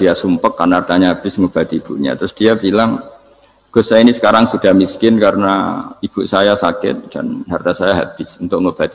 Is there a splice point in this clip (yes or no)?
no